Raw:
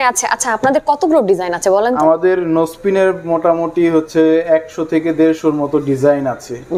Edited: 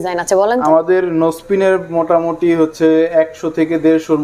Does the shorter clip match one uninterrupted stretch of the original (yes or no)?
yes